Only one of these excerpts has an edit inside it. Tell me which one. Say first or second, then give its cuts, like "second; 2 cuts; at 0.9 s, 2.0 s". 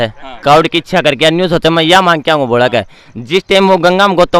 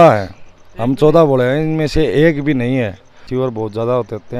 second; 1 cut; at 3.2 s